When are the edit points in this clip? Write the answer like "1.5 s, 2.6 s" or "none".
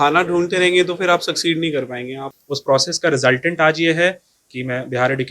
2.2 s